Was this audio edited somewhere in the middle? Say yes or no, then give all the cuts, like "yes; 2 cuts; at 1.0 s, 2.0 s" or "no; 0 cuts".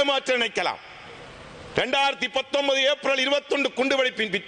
no; 0 cuts